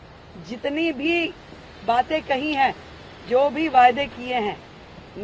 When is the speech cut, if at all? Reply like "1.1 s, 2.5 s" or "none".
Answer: none